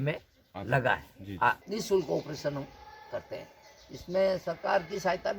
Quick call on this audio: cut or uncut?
cut